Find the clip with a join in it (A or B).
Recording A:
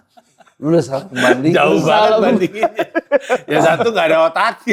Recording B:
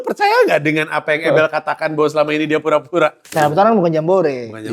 B